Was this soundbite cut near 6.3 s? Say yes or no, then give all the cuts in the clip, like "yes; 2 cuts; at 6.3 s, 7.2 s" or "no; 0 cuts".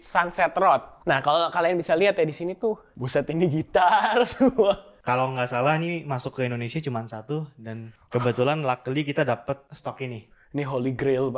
no; 5 cuts; at 0.9 s, 2.9 s, 4.9 s, 7.9 s, 9.7 s